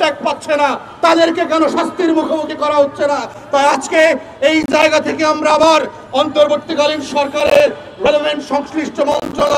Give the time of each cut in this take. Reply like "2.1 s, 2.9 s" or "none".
none